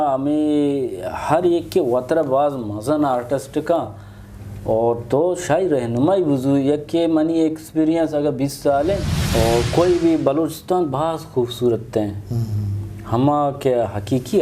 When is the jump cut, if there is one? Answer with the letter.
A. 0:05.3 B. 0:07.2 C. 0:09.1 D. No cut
C